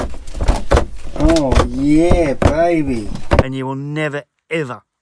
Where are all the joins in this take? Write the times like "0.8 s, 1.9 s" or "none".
3.5 s